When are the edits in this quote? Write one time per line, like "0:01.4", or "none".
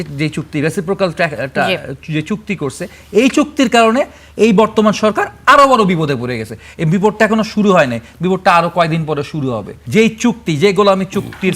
0:09.7